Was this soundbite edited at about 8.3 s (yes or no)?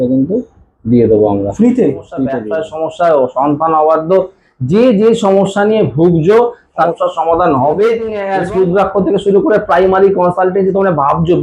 yes